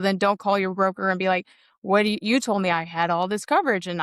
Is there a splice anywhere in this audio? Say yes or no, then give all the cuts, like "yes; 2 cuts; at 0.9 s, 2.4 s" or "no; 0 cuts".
no; 0 cuts